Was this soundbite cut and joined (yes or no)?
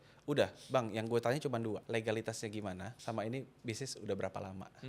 yes